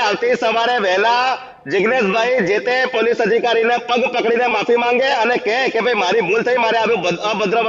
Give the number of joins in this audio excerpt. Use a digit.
0